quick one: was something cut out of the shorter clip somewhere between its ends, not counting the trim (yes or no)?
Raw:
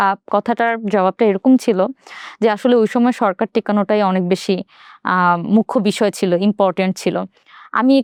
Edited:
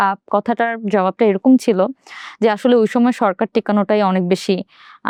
no